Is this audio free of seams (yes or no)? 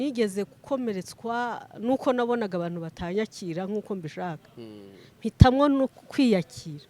yes